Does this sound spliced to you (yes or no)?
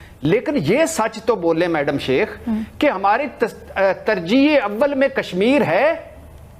no